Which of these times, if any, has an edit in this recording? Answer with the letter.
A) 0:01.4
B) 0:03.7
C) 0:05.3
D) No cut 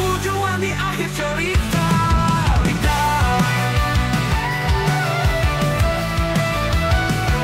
D